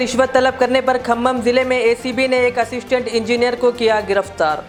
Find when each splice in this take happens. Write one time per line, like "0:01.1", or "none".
none